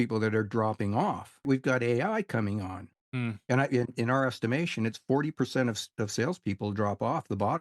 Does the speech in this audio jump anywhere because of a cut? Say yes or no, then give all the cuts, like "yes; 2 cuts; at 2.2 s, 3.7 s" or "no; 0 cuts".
yes; 2 cuts; at 1.4 s, 2.8 s